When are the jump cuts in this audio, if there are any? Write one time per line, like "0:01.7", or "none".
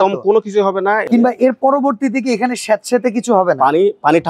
0:01.0